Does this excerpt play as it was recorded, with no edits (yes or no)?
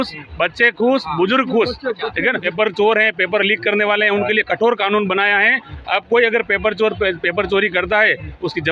no